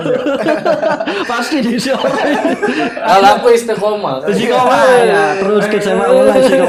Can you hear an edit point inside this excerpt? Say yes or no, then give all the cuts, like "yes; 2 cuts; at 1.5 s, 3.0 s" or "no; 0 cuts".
no; 0 cuts